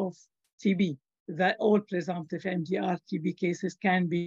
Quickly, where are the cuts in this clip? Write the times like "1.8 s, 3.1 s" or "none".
1.1 s